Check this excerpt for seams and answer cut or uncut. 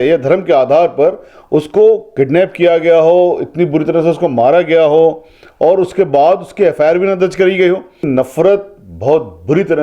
cut